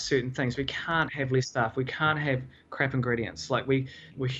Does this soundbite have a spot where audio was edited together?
no; 0 cuts

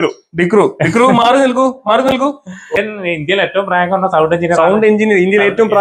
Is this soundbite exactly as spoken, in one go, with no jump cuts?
no; 1 cut; at 2.7 s

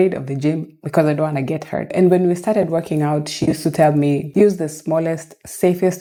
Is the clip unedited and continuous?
yes; 0 cuts

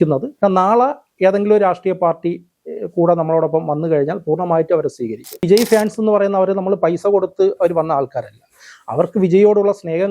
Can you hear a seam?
yes; 1 cut; at 5.4 s

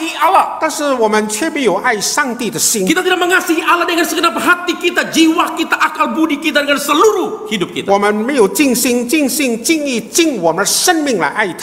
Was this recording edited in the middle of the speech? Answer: no; 0 cuts

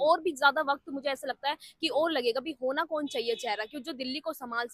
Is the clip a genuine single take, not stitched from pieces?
yes; 0 cuts

